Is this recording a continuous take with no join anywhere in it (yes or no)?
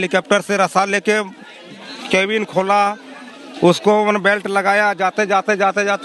yes